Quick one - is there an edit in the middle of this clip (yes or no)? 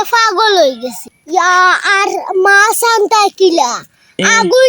yes